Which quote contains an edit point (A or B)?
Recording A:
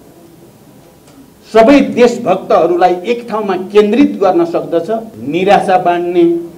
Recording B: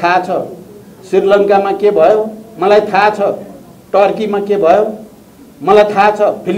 A